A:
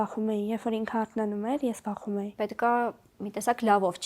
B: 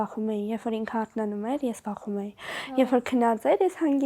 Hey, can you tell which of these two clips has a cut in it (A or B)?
A